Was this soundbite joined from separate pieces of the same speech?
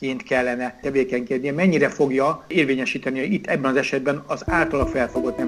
yes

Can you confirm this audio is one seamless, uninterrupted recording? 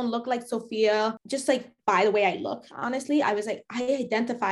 no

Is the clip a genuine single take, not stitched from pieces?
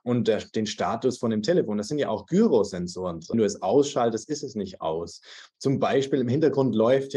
no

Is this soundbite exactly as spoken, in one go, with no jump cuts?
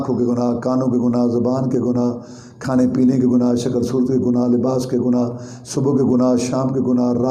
yes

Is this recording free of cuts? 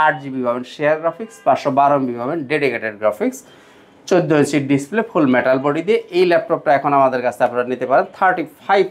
yes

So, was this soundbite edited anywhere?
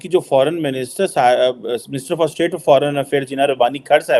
no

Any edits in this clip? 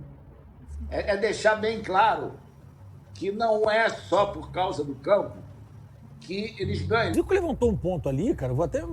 yes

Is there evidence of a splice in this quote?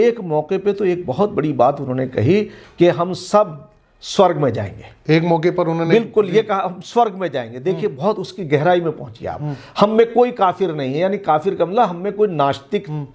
no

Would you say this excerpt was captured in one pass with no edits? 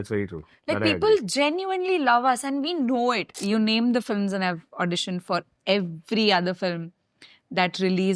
no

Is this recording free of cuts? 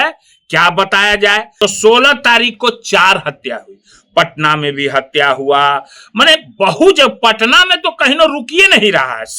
no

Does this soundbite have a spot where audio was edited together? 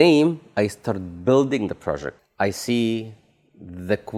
yes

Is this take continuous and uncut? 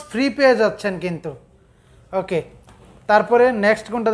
yes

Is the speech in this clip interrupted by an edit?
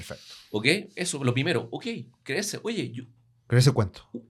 no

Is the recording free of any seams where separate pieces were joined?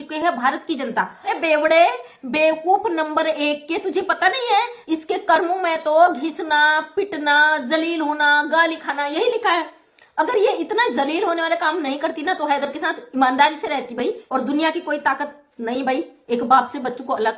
no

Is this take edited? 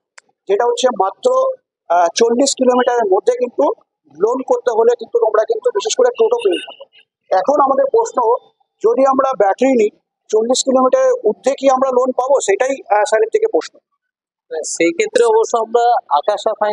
no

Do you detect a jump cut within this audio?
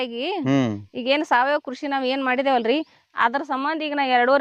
no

